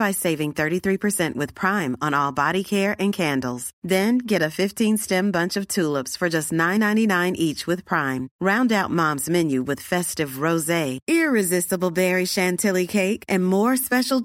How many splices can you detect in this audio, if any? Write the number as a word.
zero